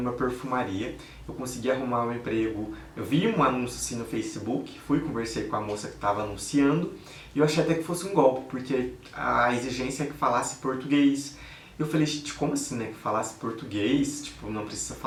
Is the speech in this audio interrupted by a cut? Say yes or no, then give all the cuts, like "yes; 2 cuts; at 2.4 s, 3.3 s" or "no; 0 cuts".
no; 0 cuts